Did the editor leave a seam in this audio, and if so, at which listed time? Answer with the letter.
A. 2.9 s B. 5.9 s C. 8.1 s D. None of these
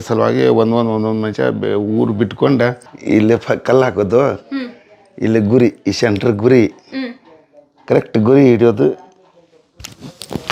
A